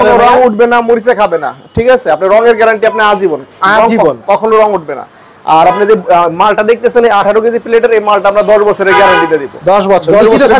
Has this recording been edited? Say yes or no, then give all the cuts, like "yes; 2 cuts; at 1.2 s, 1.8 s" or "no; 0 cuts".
no; 0 cuts